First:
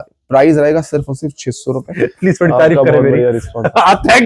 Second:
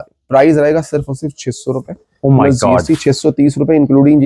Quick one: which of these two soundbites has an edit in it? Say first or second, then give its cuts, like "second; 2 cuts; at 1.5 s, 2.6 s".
first; 1 cut; at 1.9 s